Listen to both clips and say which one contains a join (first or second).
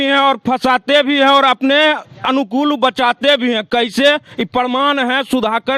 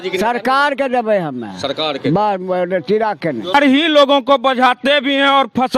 second